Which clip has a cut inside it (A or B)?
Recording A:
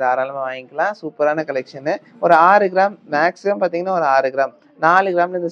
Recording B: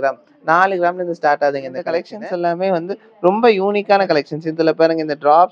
B